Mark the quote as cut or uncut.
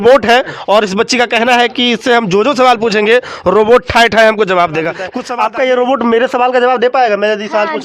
cut